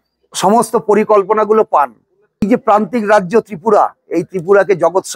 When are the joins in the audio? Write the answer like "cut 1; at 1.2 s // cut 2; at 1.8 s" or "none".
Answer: cut 1; at 2.4 s